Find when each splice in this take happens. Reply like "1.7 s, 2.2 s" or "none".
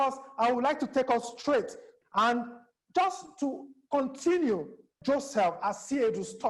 1.9 s, 4.9 s